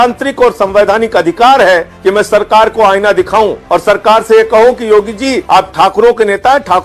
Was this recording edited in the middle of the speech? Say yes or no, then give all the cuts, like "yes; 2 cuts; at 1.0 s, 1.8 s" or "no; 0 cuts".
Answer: yes; 3 cuts; at 1.9 s, 3.6 s, 5.4 s